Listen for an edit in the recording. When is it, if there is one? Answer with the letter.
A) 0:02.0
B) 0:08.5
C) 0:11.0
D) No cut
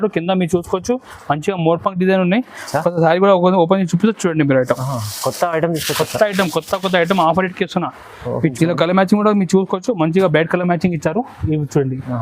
B